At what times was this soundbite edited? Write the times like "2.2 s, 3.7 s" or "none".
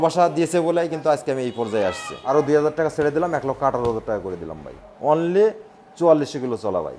2.1 s, 4.9 s